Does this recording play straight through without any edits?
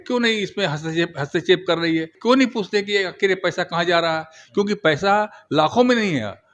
no; 1 cut; at 2.1 s

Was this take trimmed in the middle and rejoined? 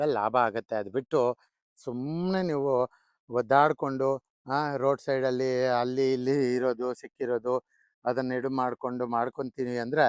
no; 0 cuts

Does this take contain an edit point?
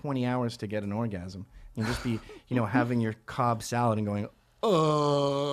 yes; 1 cut; at 2.0 s

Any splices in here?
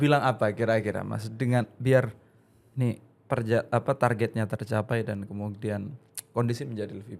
no; 0 cuts

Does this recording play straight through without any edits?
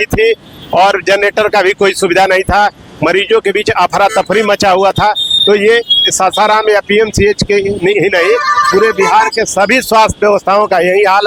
yes; 0 cuts

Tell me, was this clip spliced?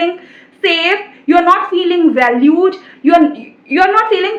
no; 0 cuts

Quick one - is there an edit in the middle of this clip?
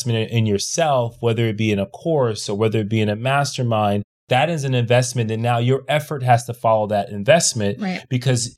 yes; 1 cut; at 4.2 s

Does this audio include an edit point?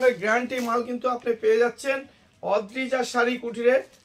no; 0 cuts

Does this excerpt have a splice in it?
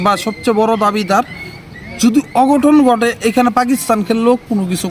no; 0 cuts

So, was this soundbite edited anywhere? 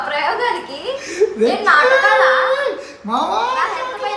yes; 1 cut; at 2.6 s

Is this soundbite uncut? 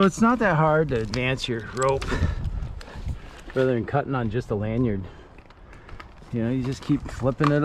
yes; 0 cuts

